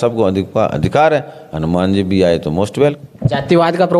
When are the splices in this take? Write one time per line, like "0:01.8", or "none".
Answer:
0:03.1